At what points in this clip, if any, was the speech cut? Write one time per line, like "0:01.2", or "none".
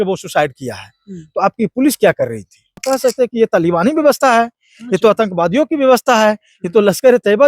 0:02.8